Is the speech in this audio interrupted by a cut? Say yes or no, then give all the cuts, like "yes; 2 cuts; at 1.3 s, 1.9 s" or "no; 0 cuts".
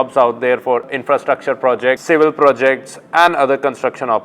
yes; 2 cuts; at 0.9 s, 2.0 s